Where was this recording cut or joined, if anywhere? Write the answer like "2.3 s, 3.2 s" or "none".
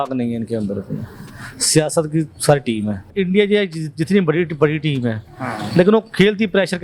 3.1 s